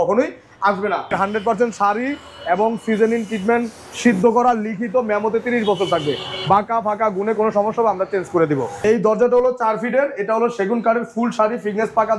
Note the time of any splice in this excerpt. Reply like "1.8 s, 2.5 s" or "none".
1.1 s, 8.8 s